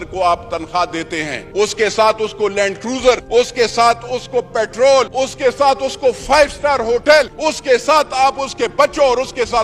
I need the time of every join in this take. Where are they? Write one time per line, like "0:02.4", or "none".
0:01.4
0:03.2
0:05.1
0:07.3